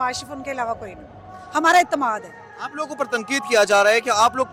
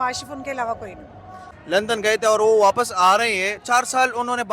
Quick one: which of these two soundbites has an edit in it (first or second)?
second